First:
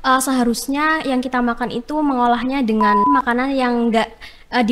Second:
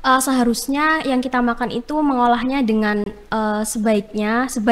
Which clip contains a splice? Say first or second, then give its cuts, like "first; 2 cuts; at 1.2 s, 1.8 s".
first; 1 cut; at 3.0 s